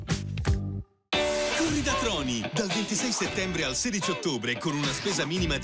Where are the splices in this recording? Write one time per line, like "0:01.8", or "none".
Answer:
0:01.0

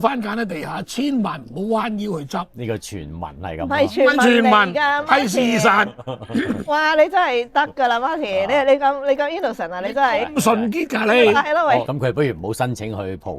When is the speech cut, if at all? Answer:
0:11.9

